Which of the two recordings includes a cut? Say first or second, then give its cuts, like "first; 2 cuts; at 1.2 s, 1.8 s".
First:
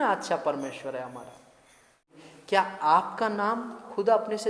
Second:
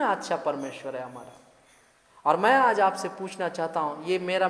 first; 1 cut; at 2.1 s